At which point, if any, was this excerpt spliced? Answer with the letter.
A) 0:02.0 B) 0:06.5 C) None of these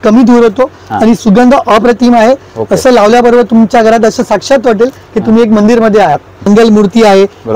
B